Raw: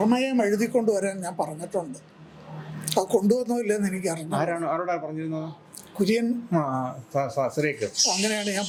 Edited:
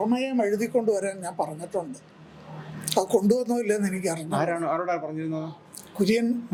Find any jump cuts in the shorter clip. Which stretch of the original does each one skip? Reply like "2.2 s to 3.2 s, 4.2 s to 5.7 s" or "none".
none